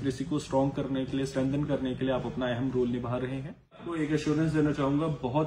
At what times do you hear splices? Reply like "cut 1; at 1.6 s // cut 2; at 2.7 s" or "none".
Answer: cut 1; at 3.9 s

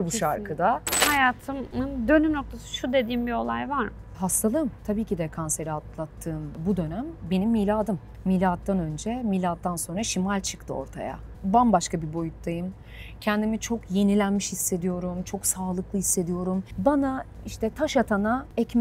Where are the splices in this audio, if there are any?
cut 1; at 1.1 s // cut 2; at 4.1 s // cut 3; at 4.8 s // cut 4; at 6.6 s // cut 5; at 8.1 s // cut 6; at 11.3 s // cut 7; at 16.7 s

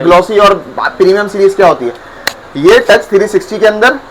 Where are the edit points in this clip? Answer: none

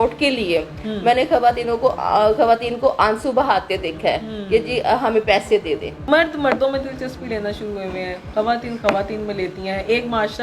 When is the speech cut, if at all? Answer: cut 1; at 5.9 s

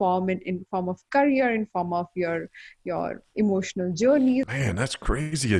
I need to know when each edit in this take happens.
cut 1; at 4.5 s

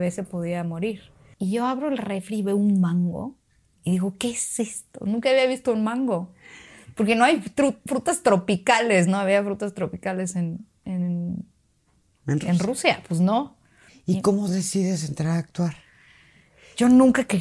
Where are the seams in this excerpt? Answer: cut 1; at 1.2 s // cut 2; at 13.9 s

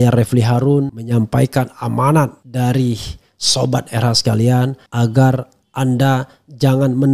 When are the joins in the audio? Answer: cut 1; at 1.0 s // cut 2; at 2.4 s // cut 3; at 4.8 s

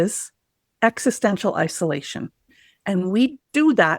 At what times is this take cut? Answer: cut 1; at 2.5 s

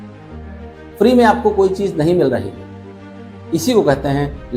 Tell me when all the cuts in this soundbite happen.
cut 1; at 1.0 s

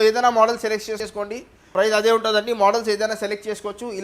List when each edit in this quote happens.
cut 1; at 1.1 s

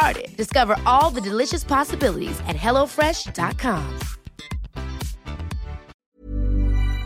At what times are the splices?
cut 1; at 5.9 s

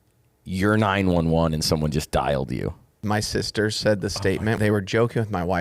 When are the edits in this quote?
cut 1; at 3.0 s // cut 2; at 4.6 s

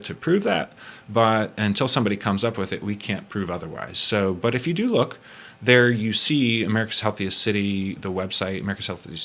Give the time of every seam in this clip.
none

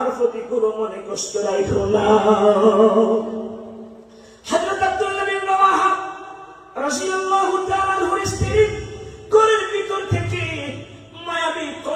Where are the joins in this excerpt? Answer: none

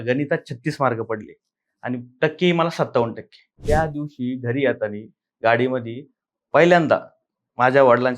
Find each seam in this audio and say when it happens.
cut 1; at 3.6 s

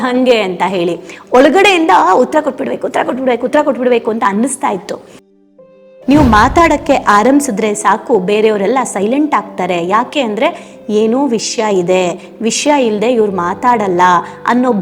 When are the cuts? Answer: cut 1; at 5.4 s

